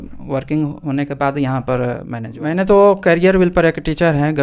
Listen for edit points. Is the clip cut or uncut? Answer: cut